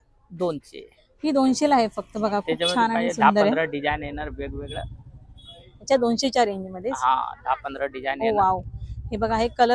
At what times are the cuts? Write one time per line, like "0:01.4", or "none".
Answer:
none